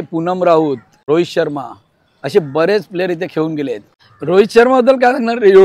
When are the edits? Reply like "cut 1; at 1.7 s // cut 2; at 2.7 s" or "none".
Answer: cut 1; at 0.9 s // cut 2; at 3.8 s